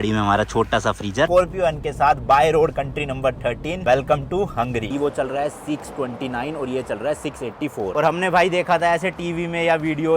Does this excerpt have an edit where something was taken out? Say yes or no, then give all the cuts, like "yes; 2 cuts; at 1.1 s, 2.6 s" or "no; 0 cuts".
yes; 3 cuts; at 1.3 s, 4.9 s, 7.9 s